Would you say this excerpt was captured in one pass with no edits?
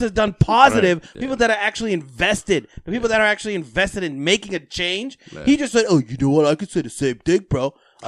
no; 1 cut; at 1.1 s

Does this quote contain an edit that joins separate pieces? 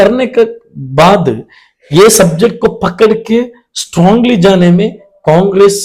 no; 0 cuts

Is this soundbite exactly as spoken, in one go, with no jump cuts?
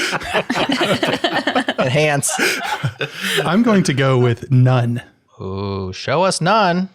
yes; 0 cuts

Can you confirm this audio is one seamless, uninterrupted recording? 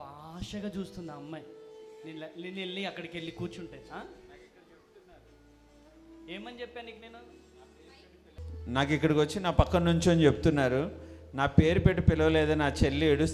yes; 0 cuts

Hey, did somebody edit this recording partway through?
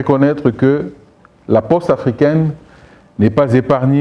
no; 0 cuts

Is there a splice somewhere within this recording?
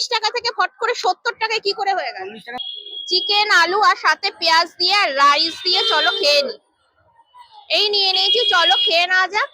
yes; 1 cut; at 2.5 s

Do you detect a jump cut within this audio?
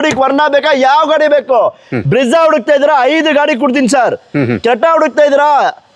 no; 0 cuts

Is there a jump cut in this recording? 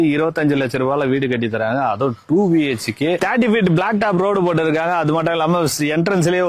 yes; 1 cut; at 3.2 s

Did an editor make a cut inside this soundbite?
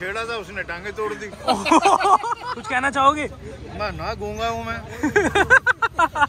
yes; 1 cut; at 2.5 s

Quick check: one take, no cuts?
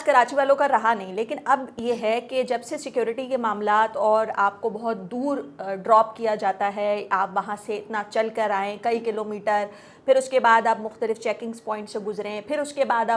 yes; 0 cuts

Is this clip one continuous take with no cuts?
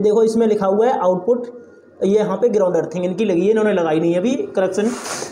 yes; 0 cuts

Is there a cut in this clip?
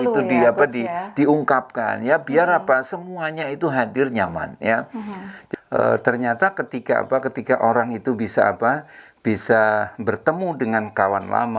yes; 1 cut; at 5.3 s

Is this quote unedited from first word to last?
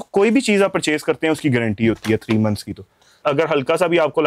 no; 1 cut; at 3.2 s

